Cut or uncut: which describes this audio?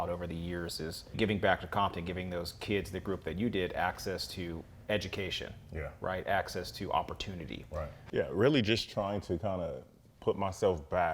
cut